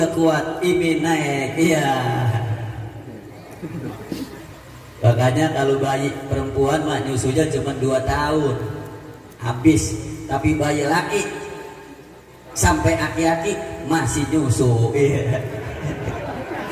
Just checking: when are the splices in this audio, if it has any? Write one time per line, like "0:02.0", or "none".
0:04.4